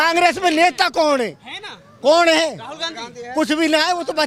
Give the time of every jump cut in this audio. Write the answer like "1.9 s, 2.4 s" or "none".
none